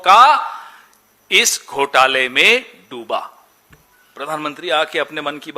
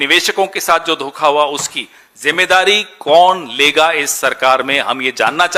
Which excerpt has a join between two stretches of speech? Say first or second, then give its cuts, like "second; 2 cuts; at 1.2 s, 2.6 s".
first; 1 cut; at 3.7 s